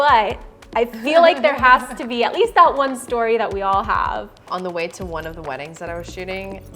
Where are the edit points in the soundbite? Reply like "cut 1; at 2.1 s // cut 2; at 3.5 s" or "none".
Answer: cut 1; at 4.4 s

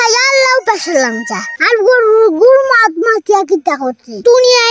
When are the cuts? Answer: cut 1; at 1.5 s

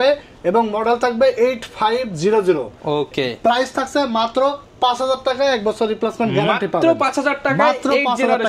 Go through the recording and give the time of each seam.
none

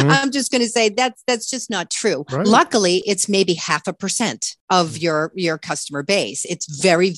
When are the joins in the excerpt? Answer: cut 1; at 4.5 s

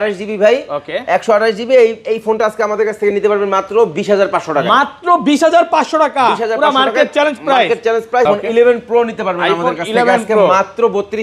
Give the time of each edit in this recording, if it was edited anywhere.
cut 1; at 8.3 s

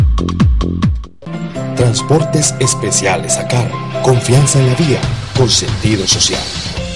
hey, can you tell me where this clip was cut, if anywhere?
cut 1; at 1.0 s

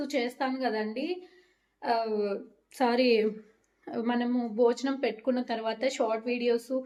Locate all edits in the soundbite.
none

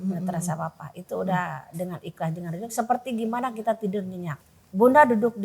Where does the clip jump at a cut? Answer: cut 1; at 4.3 s

